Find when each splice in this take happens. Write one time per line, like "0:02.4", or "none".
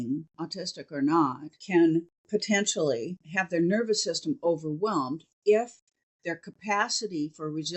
0:01.5
0:02.2
0:03.2